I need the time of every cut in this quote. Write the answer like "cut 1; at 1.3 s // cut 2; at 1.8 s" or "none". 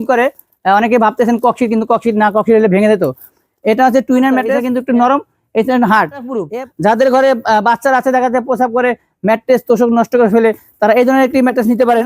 cut 1; at 4.6 s // cut 2; at 6.4 s